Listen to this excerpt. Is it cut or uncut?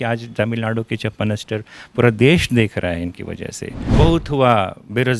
cut